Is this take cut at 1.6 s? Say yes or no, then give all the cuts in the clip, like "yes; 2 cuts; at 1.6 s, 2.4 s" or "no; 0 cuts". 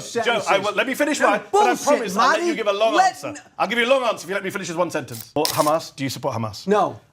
no; 1 cut; at 5.3 s